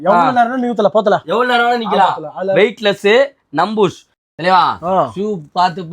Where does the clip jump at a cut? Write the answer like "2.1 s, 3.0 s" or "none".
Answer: 4.1 s